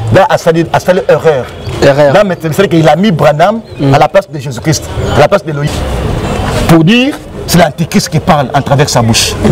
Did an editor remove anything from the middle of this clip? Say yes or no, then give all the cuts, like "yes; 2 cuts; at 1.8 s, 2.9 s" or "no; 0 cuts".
yes; 1 cut; at 5.6 s